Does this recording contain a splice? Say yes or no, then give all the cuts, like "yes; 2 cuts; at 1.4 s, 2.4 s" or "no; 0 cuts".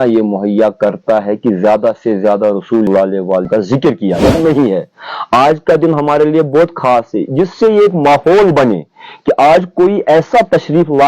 yes; 1 cut; at 4.3 s